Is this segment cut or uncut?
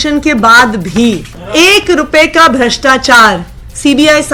cut